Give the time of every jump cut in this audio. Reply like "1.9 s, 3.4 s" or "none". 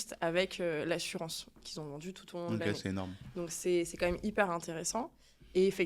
none